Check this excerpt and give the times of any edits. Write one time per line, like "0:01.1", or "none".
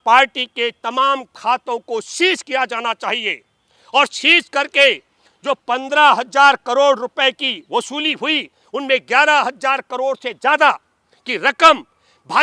none

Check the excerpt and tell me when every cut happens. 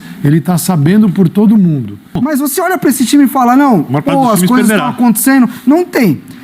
0:02.2

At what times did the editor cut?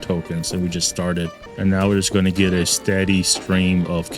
0:01.4

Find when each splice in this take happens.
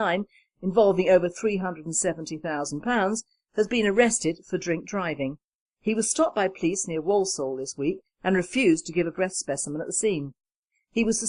none

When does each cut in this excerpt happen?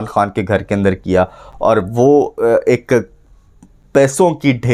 none

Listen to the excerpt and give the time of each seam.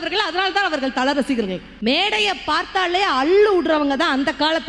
0:01.7

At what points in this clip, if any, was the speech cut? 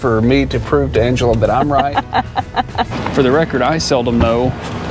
0:02.9

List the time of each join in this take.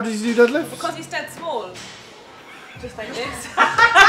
none

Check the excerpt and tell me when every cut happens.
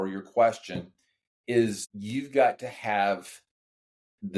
0:01.9

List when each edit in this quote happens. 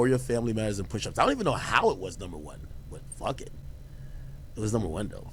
none

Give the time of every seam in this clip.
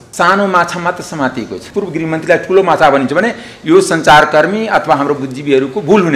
0:01.6

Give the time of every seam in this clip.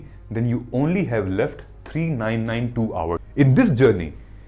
0:03.3

